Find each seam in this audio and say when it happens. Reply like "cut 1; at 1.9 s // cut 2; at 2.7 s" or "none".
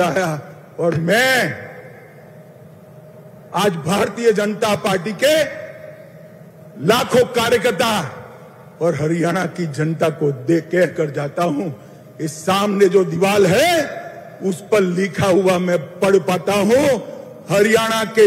none